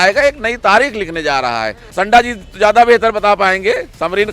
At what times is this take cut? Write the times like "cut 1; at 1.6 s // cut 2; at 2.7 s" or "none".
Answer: cut 1; at 1.9 s